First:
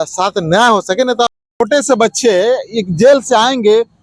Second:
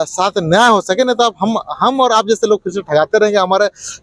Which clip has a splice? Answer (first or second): first